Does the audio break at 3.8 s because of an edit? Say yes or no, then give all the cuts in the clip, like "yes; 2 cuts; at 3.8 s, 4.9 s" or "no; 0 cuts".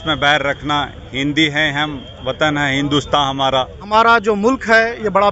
yes; 1 cut; at 3.8 s